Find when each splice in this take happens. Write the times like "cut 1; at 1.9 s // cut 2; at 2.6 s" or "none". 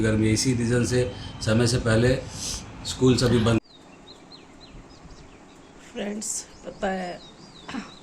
cut 1; at 3.6 s

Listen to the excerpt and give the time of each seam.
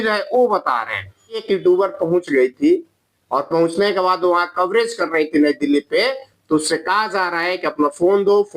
cut 1; at 1.4 s

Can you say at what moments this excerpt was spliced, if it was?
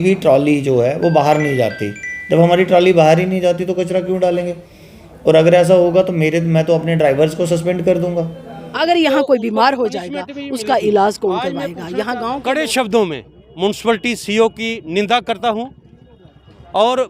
cut 1; at 8.7 s // cut 2; at 12.2 s

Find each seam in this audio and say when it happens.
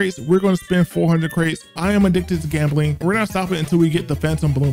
cut 1; at 1.8 s // cut 2; at 3.0 s

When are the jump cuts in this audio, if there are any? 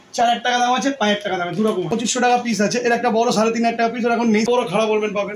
cut 1; at 1.7 s // cut 2; at 4.5 s

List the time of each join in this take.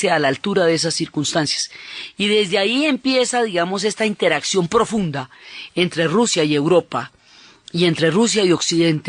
cut 1; at 5.3 s

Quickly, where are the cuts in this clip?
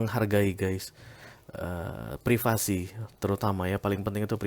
none

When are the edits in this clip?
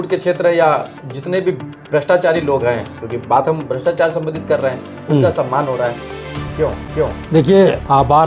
none

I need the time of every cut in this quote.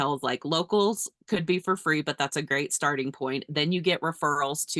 none

